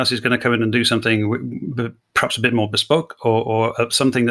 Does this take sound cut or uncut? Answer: uncut